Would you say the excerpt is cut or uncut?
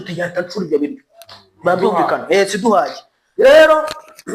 uncut